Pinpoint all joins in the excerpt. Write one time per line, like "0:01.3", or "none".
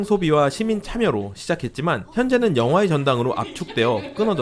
none